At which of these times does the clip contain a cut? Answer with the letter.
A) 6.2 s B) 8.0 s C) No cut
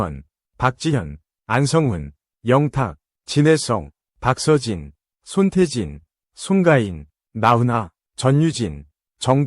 B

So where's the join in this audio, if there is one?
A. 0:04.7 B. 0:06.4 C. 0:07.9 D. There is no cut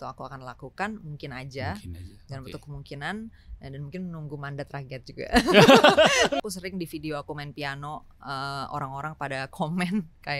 B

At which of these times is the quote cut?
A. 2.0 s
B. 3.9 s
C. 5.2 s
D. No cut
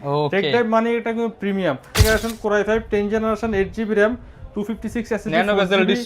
A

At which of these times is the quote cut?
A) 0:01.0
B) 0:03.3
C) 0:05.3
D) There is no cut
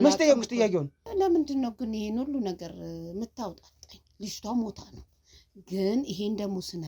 A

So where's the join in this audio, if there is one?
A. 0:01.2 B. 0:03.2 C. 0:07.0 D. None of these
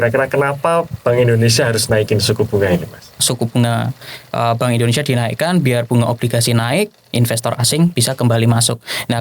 B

